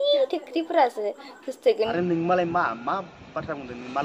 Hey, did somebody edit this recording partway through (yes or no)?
yes